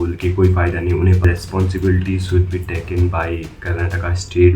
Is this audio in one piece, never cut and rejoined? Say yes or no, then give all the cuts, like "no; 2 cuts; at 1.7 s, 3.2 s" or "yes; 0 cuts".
no; 1 cut; at 1.2 s